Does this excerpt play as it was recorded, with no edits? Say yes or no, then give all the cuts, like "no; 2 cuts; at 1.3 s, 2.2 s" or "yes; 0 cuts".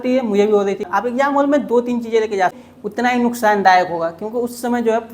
no; 2 cuts; at 0.9 s, 2.7 s